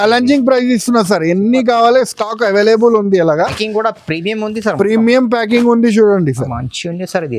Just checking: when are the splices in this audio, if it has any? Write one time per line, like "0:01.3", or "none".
0:06.5